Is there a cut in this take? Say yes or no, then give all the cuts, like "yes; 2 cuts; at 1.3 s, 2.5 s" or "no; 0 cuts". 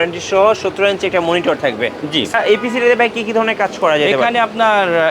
yes; 1 cut; at 2.4 s